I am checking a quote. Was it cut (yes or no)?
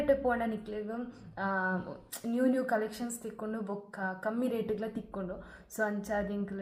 no